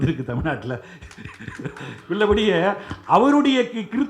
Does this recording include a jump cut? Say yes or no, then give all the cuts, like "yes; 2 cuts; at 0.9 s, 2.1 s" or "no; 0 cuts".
no; 0 cuts